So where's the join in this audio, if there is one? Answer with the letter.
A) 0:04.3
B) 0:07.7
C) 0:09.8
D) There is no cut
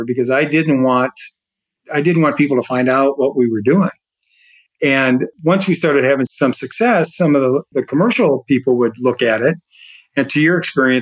B